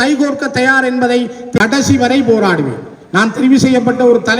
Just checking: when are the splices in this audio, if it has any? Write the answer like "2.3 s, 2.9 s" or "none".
1.6 s